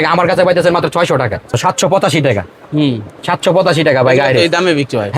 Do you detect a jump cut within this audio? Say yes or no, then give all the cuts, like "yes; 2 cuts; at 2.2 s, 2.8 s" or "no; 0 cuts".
yes; 1 cut; at 1.5 s